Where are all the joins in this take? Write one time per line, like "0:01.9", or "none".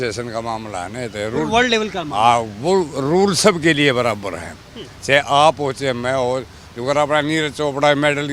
none